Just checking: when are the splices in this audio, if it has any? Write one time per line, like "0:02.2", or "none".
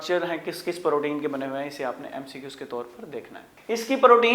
0:03.4